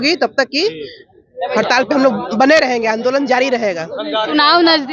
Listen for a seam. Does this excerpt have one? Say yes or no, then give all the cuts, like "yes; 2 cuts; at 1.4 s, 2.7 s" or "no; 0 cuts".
no; 0 cuts